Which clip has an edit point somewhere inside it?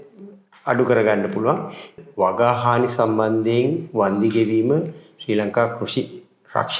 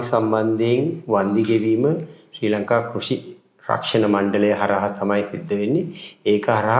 first; 1 cut; at 2.0 s

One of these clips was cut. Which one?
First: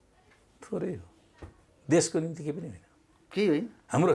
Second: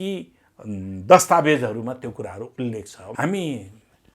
second; 1 cut; at 3.0 s

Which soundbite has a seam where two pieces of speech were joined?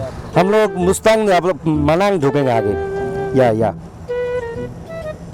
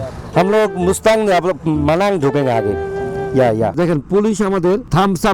second; 1 cut; at 3.7 s

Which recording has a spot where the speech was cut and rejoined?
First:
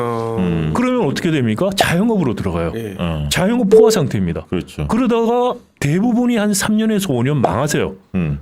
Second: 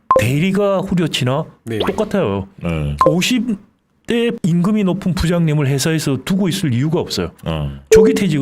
second; 1 cut; at 4.4 s

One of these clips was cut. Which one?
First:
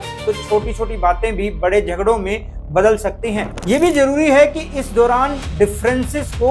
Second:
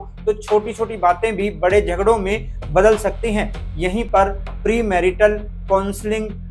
first; 1 cut; at 3.5 s

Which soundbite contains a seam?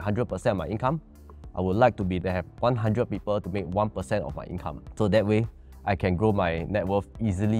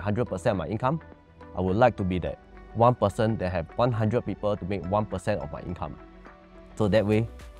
first; 2 cuts; at 2.4 s, 4.8 s

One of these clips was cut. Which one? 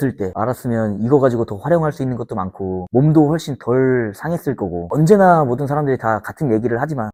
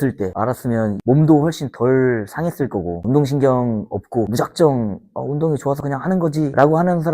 second; 2 cuts; at 1.0 s, 3.0 s

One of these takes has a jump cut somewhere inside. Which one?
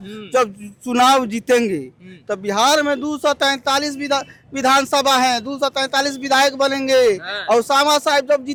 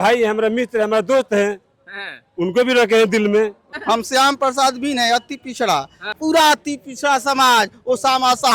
second; 2 cuts; at 3.7 s, 6.1 s

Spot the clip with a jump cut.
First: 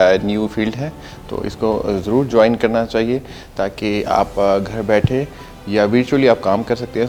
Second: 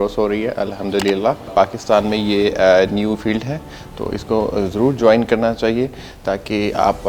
second; 1 cut; at 1.5 s

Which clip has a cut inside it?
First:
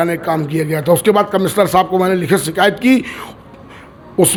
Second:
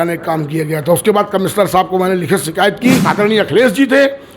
second; 1 cut; at 3.0 s

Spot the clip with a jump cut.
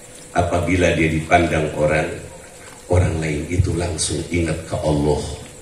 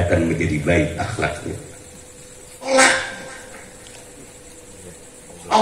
second; 1 cut; at 2.7 s

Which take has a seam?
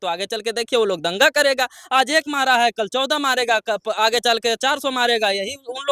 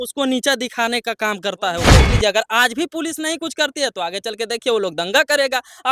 second; 1 cut; at 2.1 s

